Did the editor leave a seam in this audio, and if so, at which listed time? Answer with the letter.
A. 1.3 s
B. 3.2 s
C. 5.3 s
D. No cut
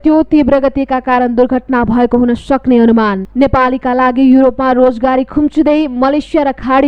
B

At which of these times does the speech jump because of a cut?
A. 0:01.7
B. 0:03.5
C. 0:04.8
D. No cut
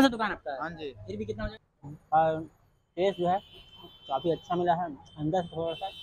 A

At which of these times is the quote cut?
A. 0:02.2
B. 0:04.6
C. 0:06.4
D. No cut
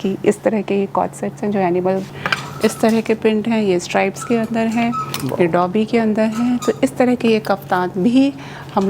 A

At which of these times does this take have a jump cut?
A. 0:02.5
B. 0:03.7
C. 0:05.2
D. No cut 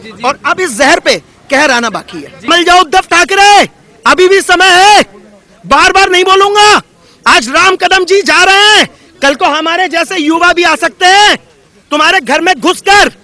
A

